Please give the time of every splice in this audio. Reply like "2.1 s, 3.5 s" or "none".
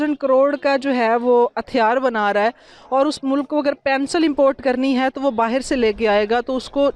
none